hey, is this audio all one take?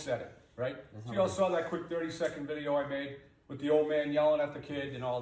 yes; 0 cuts

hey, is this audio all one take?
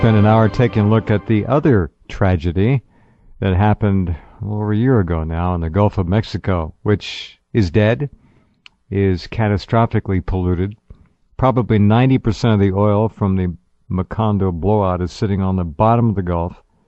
yes; 0 cuts

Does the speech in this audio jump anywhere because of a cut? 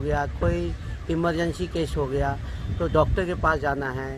no; 0 cuts

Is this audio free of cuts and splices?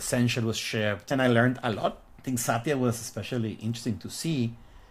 no; 2 cuts; at 1.1 s, 2.1 s

